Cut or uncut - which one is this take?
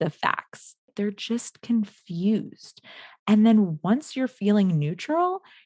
cut